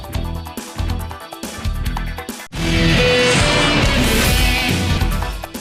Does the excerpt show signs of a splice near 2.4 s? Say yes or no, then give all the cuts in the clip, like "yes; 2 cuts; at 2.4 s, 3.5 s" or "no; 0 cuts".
yes; 1 cut; at 2.4 s